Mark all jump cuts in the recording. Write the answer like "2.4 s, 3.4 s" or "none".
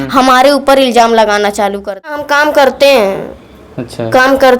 2.2 s